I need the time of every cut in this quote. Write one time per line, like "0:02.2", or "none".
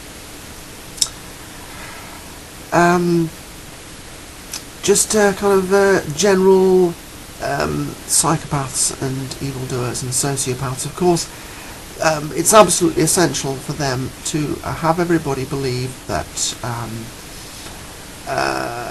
0:03.5